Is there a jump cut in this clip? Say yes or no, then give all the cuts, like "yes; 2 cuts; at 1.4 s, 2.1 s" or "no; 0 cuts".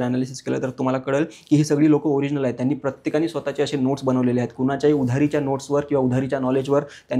no; 0 cuts